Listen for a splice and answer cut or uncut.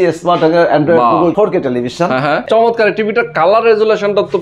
cut